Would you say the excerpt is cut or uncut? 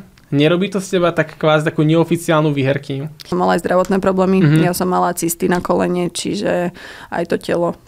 cut